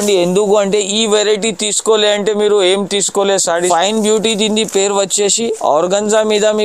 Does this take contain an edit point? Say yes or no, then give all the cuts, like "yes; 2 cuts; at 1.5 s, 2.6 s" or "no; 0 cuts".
yes; 1 cut; at 3.7 s